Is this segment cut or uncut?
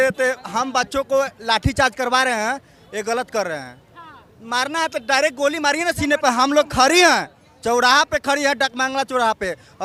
uncut